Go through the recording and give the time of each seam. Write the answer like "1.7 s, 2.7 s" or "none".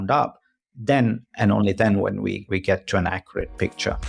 2.4 s